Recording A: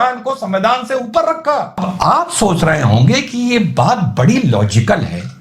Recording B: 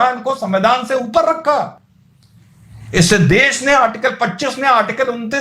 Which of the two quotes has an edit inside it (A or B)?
A